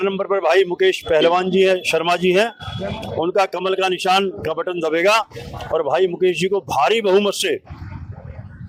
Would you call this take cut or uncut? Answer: uncut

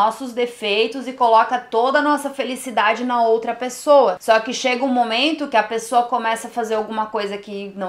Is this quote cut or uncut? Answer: uncut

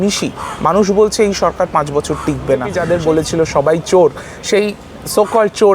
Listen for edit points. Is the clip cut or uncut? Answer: cut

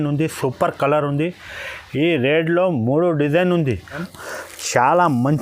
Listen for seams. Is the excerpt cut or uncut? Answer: cut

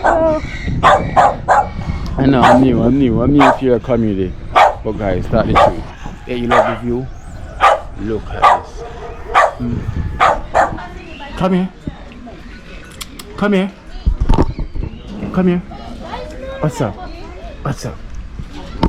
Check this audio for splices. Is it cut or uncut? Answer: cut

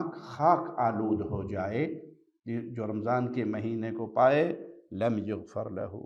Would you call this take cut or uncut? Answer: uncut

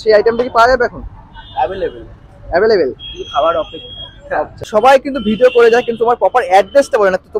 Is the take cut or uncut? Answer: cut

